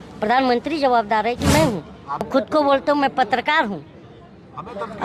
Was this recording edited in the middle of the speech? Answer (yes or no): yes